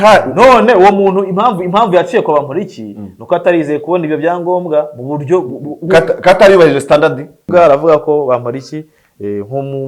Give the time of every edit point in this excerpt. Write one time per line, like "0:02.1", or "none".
0:07.4